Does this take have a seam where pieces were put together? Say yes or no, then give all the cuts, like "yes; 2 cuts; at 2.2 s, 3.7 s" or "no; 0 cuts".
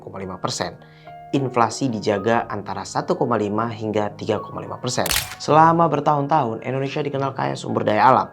yes; 1 cut; at 5.3 s